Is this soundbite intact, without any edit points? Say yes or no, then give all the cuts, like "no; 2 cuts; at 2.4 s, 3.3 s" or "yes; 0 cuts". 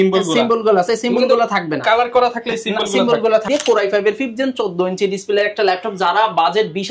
no; 1 cut; at 3.4 s